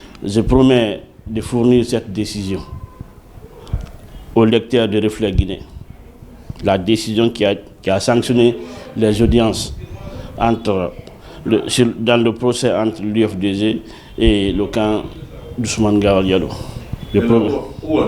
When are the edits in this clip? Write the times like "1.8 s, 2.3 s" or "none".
none